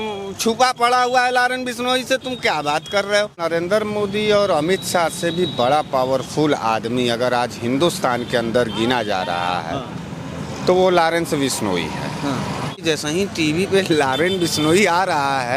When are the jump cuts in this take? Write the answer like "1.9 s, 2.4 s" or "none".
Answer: 3.4 s, 12.8 s